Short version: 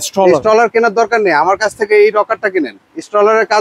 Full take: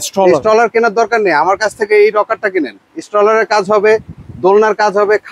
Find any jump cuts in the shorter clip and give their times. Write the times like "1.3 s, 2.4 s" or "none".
none